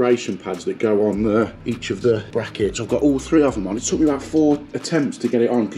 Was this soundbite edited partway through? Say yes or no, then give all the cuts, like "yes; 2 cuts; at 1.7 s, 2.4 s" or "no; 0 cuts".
yes; 2 cuts; at 1.6 s, 2.3 s